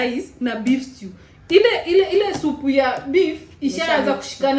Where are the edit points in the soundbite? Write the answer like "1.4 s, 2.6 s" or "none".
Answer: none